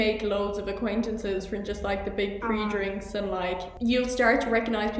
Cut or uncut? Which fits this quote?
cut